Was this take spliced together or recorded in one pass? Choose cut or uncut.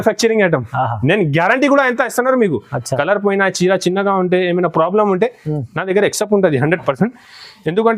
uncut